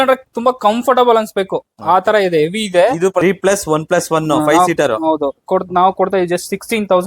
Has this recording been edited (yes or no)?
yes